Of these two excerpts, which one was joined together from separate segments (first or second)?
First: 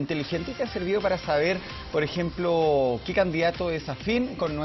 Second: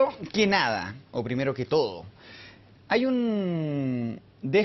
second